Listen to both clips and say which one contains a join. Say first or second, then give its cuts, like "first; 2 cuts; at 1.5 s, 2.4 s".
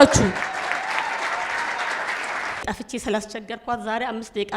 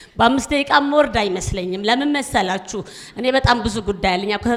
first; 1 cut; at 2.6 s